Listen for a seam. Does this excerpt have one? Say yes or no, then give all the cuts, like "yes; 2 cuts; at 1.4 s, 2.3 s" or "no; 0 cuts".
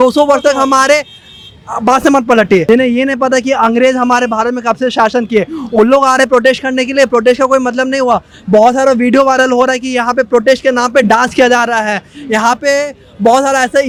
no; 0 cuts